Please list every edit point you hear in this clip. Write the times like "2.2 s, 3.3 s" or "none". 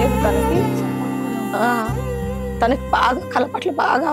none

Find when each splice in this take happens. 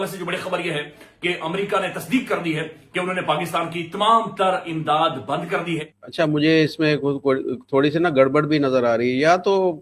6.0 s

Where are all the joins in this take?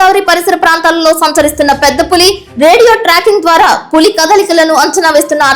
none

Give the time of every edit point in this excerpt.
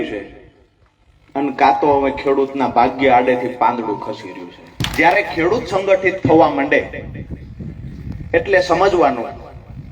4.8 s

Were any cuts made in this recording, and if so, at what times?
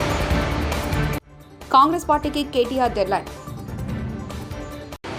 none

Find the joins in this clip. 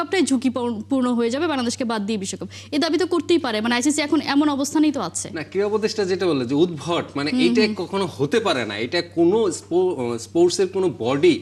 none

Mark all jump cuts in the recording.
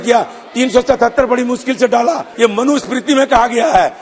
2.3 s

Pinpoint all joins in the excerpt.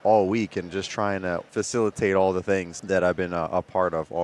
1.5 s, 2.7 s

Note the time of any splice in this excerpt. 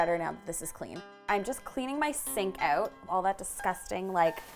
1.2 s

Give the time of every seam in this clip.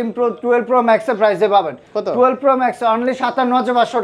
none

